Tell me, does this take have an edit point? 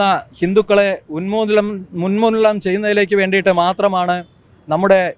no; 0 cuts

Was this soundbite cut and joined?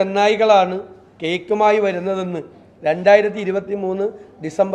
no; 0 cuts

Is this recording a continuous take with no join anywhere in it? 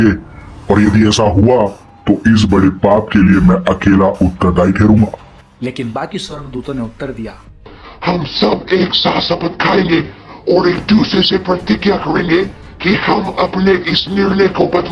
yes; 0 cuts

